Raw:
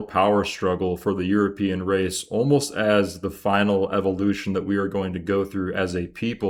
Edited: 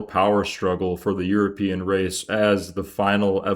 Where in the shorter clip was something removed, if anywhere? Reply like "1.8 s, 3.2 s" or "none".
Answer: 2.2 s